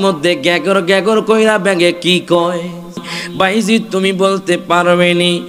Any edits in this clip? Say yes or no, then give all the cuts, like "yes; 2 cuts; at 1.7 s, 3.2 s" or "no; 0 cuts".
yes; 1 cut; at 3.2 s